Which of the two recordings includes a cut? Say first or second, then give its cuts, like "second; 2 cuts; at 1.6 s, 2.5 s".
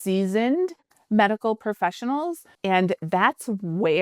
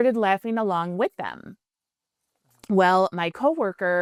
first; 1 cut; at 2.5 s